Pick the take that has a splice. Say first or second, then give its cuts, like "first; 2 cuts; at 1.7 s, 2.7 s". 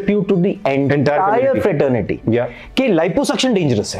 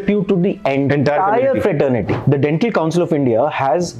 second; 1 cut; at 2.1 s